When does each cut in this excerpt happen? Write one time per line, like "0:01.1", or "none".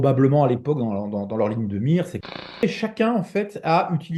0:02.6